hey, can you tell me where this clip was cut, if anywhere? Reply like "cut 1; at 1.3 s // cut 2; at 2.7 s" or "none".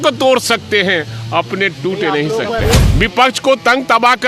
cut 1; at 2.8 s